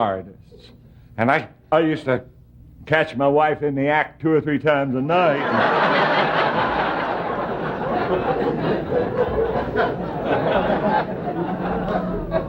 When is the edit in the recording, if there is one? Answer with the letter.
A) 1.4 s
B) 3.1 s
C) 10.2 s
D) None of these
D